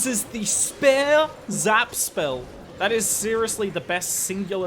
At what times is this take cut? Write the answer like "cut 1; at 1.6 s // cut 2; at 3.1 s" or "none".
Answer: cut 1; at 2.6 s